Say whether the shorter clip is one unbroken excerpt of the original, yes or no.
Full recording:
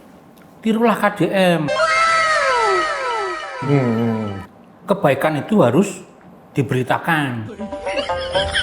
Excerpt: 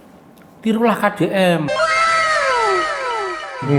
yes